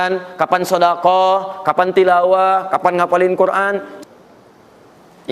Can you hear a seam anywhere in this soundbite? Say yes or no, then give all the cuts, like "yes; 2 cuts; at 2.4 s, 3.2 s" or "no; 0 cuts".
yes; 1 cut; at 3.9 s